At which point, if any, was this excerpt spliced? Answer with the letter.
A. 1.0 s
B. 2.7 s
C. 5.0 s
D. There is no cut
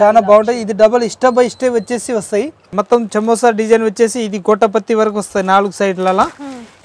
B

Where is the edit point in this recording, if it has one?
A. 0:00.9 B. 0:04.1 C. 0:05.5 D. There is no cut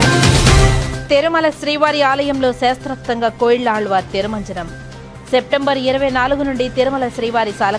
A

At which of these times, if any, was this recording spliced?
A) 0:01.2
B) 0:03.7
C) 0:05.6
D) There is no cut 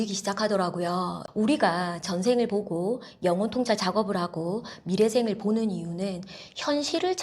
A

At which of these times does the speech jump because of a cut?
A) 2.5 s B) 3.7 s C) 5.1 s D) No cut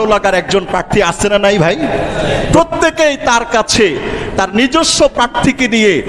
A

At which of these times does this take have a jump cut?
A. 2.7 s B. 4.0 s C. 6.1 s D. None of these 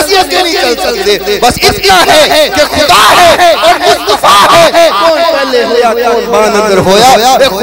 D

